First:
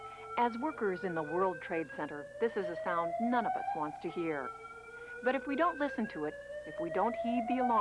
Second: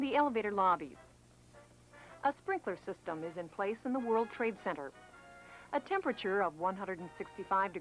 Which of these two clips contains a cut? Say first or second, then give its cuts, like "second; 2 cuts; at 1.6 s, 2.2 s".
first; 1 cut; at 0.9 s